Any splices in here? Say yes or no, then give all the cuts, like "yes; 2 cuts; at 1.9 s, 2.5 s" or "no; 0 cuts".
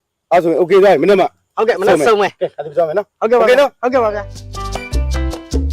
yes; 1 cut; at 4.4 s